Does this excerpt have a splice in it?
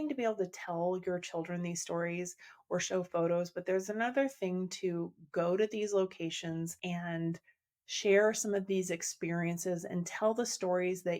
yes; 1 cut; at 6.8 s

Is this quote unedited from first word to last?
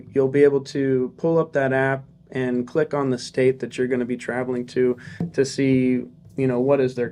yes; 0 cuts

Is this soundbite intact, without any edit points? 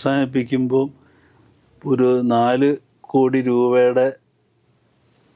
yes; 0 cuts

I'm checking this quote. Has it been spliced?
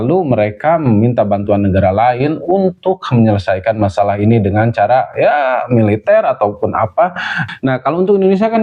yes; 1 cut; at 7.4 s

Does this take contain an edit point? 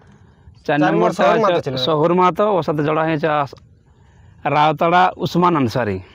no; 0 cuts

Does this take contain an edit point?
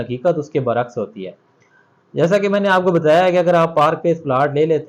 no; 0 cuts

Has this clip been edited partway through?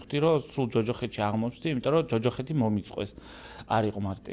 no; 0 cuts

